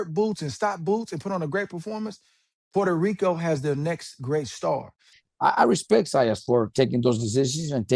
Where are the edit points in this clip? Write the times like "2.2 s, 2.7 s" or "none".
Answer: 5.1 s

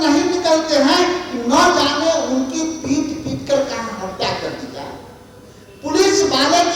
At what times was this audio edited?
none

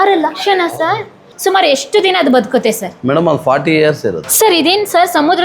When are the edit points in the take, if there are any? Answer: 1.2 s, 4.2 s

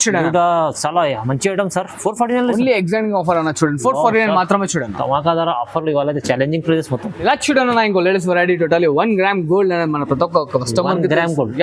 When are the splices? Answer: none

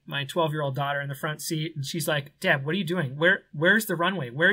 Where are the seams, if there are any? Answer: none

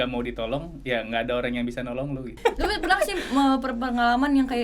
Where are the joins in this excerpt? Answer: 2.4 s

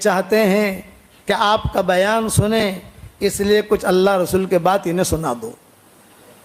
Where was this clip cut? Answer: none

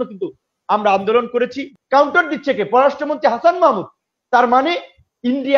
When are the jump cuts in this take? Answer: 1.7 s

